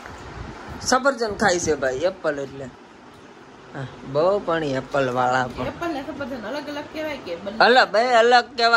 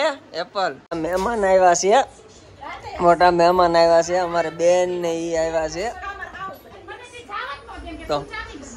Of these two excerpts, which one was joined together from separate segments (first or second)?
second